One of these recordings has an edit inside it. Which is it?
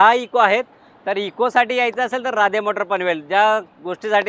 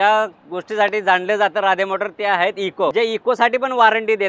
second; 1 cut; at 2.9 s

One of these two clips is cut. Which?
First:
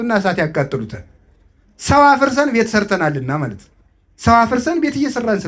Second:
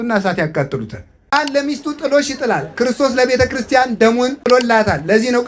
second; 2 cuts; at 1.3 s, 4.4 s

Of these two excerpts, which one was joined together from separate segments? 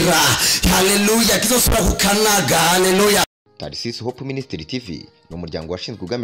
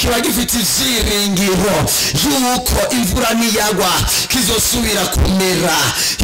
first; 1 cut; at 3.4 s

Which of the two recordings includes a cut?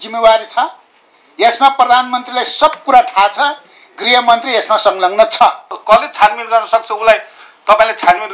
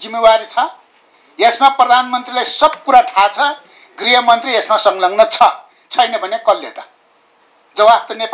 first; 1 cut; at 5.7 s

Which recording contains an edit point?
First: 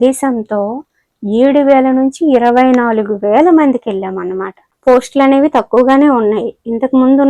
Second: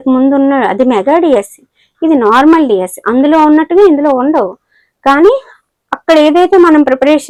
first; 1 cut; at 4.7 s

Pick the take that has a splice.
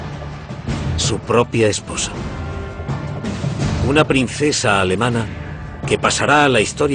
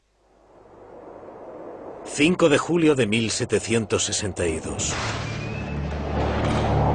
first; 1 cut; at 2.1 s

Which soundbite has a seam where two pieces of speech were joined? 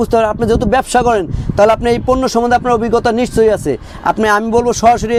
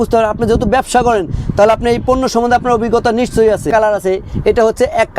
second; 1 cut; at 3.7 s

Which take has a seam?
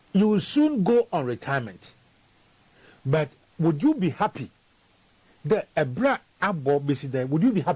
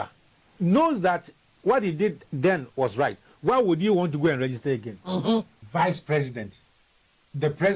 second; 1 cut; at 5.6 s

